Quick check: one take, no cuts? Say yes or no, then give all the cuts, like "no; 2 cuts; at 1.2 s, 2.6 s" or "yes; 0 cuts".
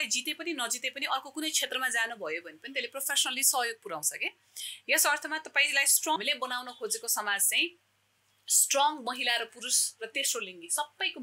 no; 1 cut; at 6.2 s